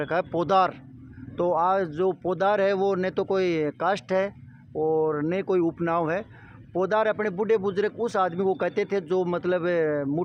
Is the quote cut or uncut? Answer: uncut